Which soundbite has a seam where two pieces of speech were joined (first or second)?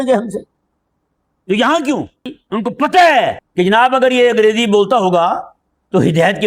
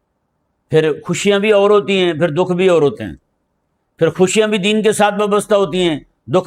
first